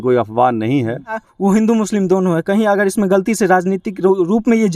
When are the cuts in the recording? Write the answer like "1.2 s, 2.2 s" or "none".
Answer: 1.3 s